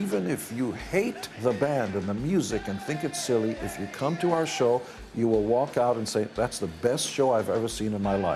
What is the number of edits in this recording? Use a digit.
1